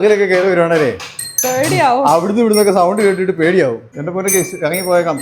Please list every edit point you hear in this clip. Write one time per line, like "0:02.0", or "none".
0:03.9